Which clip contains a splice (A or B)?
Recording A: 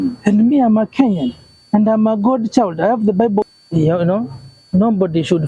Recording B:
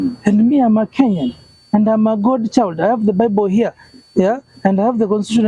A